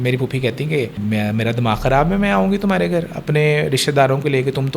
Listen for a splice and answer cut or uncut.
cut